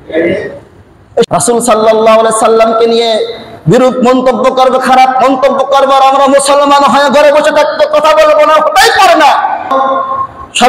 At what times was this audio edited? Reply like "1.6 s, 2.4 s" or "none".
1.3 s, 9.7 s

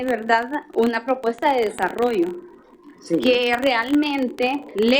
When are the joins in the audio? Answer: none

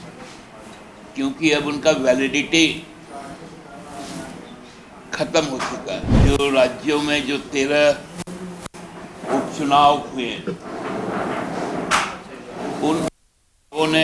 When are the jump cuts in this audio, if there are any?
6.1 s

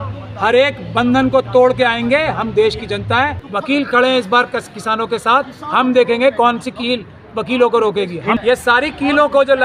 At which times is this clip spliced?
3.4 s, 8.4 s

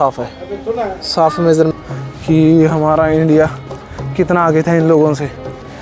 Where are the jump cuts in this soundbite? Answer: 1.7 s

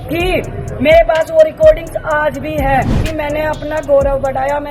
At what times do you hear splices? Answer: 3.0 s

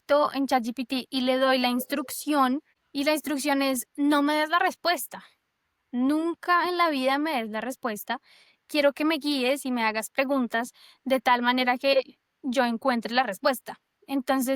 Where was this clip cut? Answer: 2.8 s

